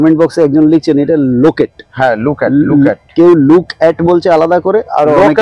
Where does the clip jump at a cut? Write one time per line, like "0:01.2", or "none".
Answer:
none